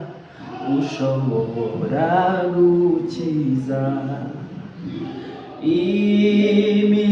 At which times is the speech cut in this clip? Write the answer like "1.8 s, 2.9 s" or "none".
none